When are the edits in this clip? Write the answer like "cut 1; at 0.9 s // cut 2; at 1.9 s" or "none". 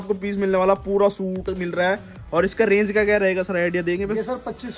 none